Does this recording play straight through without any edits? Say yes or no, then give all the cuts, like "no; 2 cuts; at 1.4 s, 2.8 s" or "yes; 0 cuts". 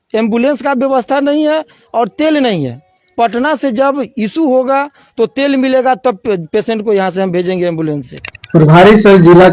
no; 1 cut; at 8.2 s